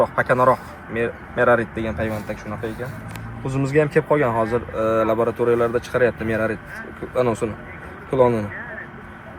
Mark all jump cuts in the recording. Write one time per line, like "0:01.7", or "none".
none

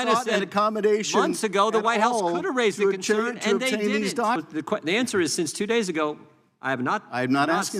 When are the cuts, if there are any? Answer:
0:04.4

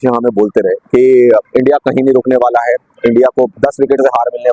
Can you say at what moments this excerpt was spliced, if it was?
0:00.8
0:01.5
0:03.5

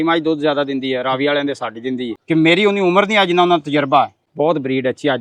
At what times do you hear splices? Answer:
0:02.1
0:04.2

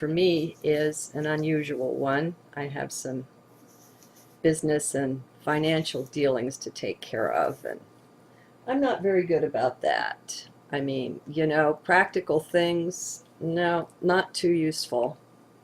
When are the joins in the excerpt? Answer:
0:02.7

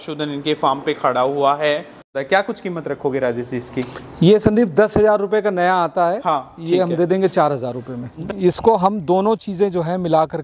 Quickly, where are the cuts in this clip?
0:02.2
0:08.1

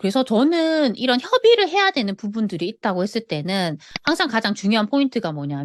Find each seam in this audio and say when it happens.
none

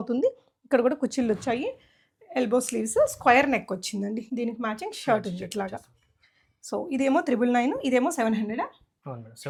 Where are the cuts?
none

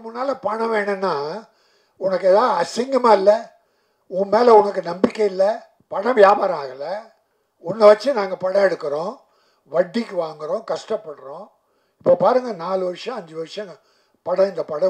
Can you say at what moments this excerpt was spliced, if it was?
0:05.8

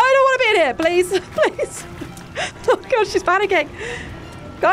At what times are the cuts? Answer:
none

